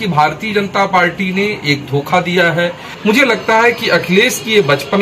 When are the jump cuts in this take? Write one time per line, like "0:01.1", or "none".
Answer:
0:02.9